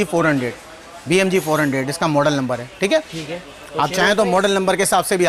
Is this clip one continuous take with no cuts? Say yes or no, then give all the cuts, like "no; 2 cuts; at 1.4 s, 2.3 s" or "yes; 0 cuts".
yes; 0 cuts